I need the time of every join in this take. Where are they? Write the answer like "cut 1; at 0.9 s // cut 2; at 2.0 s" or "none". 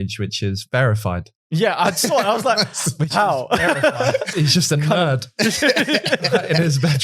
cut 1; at 4.3 s